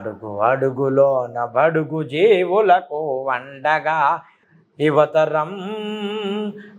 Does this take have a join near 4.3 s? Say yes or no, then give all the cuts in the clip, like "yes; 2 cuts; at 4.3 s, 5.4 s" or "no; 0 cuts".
no; 0 cuts